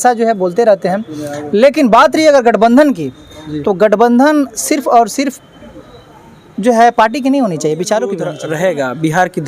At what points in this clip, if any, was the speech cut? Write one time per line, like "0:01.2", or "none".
0:08.3